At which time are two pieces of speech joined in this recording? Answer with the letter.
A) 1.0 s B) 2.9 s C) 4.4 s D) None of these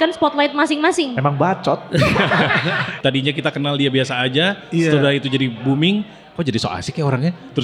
B